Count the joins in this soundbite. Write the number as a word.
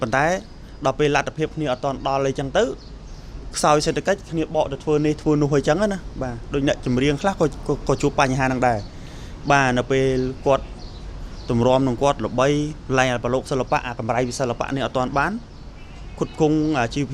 zero